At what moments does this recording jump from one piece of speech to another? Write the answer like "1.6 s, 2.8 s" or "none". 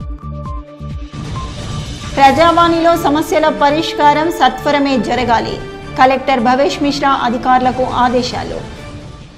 none